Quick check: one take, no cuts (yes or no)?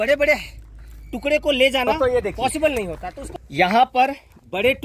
no